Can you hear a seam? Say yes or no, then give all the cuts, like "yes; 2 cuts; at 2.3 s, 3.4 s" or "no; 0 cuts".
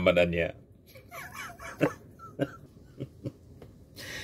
yes; 1 cut; at 2.8 s